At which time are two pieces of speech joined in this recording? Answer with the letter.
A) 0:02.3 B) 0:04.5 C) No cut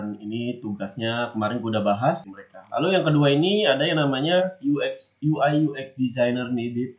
A